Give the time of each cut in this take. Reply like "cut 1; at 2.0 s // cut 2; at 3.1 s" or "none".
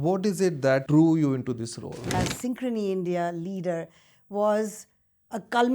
cut 1; at 0.9 s // cut 2; at 2.1 s

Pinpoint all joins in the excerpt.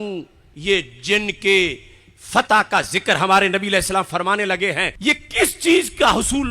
cut 1; at 4.9 s

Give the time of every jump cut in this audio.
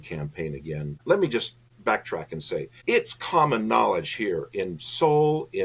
cut 1; at 1.0 s // cut 2; at 1.6 s // cut 3; at 2.7 s

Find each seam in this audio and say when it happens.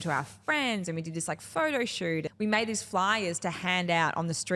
cut 1; at 2.3 s

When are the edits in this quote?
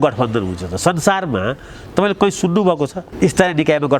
cut 1; at 3.0 s

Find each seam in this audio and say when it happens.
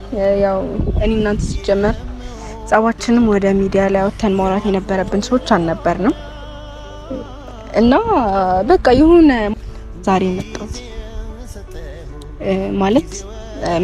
cut 1; at 9.5 s

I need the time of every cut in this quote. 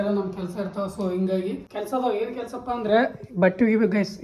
cut 1; at 1.7 s

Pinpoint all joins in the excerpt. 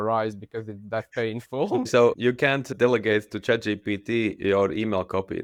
none

